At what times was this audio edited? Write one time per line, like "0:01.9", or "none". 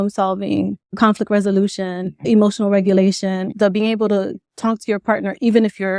0:01.0
0:02.3
0:03.5